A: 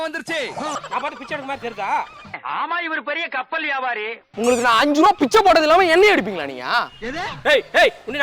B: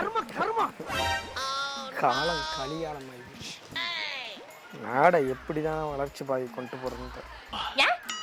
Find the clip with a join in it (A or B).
A